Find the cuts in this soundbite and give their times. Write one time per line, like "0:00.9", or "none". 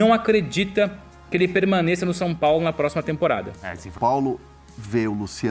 0:03.9

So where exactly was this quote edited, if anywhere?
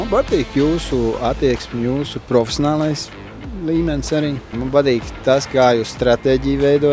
0:04.5

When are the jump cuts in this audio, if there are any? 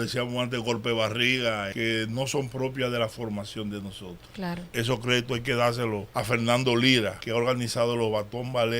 0:01.7
0:04.6
0:06.1
0:07.2

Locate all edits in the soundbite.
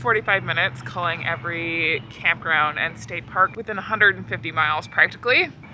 none

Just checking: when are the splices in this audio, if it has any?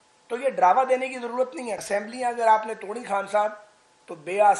0:01.8

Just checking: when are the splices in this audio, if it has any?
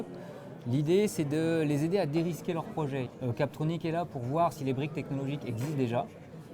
0:03.1

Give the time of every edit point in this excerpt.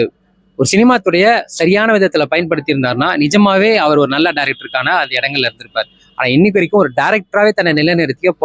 none

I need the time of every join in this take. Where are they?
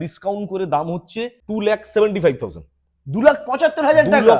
0:01.4

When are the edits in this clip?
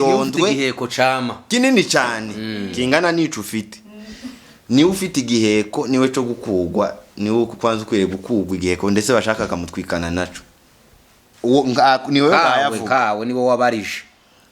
0:11.2

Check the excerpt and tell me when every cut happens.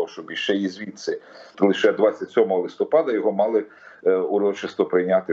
0:01.5

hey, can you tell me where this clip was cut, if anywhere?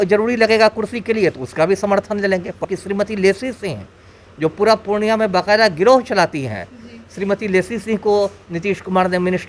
0:02.6

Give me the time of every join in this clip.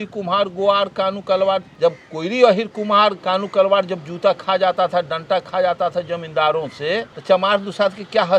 0:01.7
0:03.2
0:07.1

